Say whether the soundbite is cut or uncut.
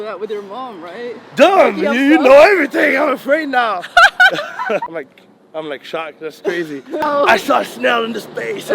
cut